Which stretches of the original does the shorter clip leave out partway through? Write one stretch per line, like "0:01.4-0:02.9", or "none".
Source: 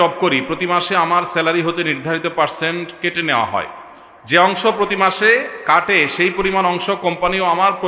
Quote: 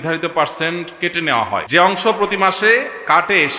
0:03.7-0:04.2